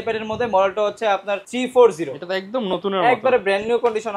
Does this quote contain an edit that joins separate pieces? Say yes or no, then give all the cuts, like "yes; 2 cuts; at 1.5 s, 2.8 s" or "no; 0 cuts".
yes; 1 cut; at 1.5 s